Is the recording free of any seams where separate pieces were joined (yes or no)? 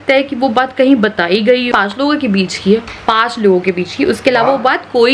no